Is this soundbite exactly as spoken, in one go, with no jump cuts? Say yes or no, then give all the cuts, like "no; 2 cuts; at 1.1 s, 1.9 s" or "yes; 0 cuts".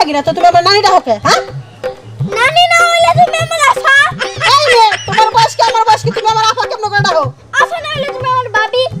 yes; 0 cuts